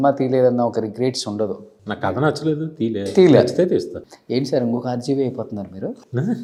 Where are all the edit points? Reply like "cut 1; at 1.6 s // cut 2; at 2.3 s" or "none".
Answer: none